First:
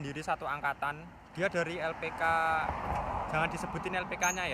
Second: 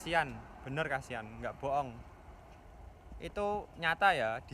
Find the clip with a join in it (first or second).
first